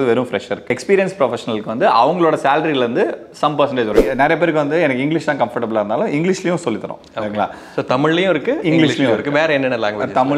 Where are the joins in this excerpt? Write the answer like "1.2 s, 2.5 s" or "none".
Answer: 0.8 s, 4.1 s